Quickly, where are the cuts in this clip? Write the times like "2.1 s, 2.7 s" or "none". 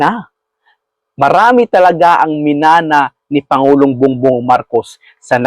none